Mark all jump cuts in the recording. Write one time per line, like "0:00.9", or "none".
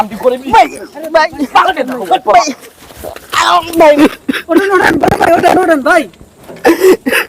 0:03.7